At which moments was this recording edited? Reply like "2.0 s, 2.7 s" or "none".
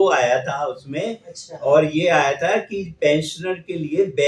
none

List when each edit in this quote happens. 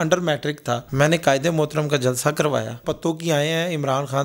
0.8 s, 2.8 s

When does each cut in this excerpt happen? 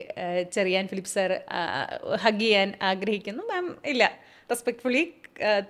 none

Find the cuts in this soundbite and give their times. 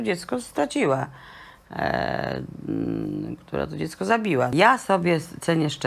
4.5 s

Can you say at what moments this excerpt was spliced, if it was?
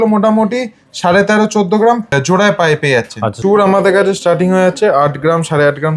2.1 s, 3.3 s

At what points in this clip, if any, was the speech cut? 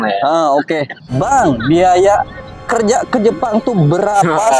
1.0 s

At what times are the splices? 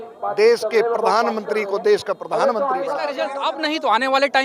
3.2 s

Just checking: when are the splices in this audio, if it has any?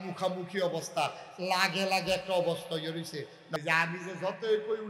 3.5 s

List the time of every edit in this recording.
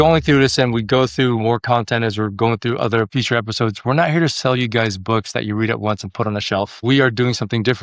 6.7 s

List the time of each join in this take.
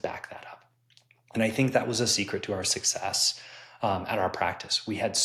none

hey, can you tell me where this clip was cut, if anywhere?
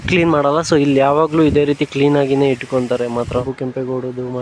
3.4 s

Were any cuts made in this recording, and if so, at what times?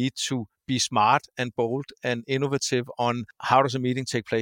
3.3 s

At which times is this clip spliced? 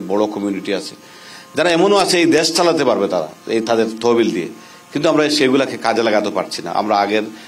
none

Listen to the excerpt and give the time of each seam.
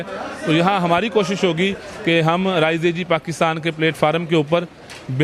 none

